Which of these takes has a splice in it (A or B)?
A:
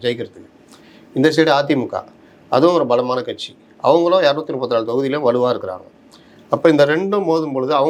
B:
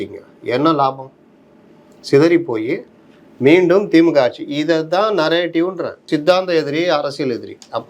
B